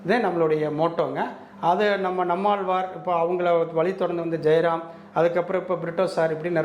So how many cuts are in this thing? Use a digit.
0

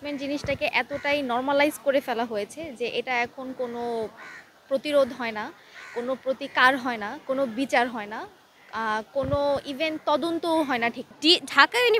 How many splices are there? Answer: 0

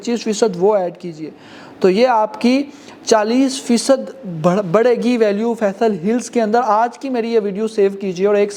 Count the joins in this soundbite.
0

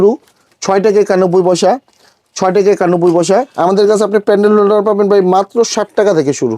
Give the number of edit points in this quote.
1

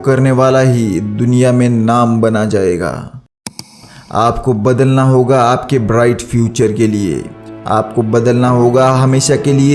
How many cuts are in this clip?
1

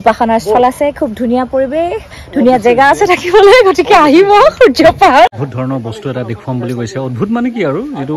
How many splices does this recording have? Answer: 1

